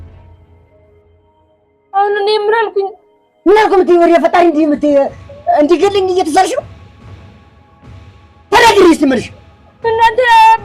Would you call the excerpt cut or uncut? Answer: uncut